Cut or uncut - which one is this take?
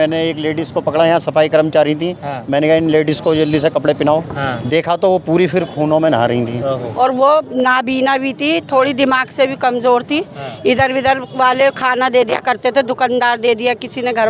cut